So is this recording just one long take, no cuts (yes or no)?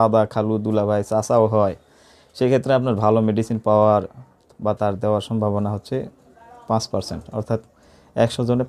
yes